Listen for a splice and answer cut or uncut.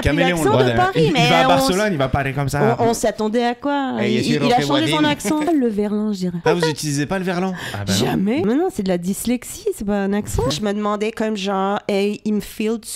cut